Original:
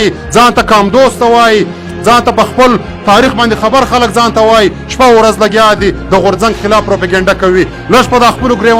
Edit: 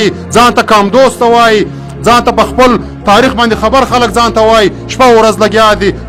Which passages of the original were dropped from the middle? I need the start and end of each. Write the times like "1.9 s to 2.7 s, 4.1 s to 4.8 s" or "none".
none